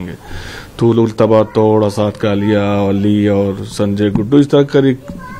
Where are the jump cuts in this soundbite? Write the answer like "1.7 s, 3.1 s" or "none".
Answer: none

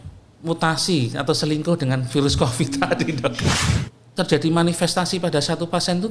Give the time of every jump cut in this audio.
3.6 s

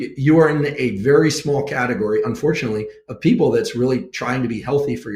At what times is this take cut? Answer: none

